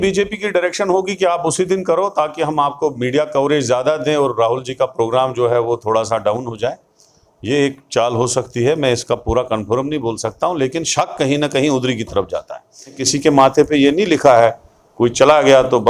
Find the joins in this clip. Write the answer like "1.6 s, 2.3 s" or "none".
13.1 s